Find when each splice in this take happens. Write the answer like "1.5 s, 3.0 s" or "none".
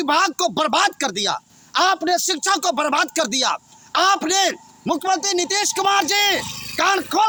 none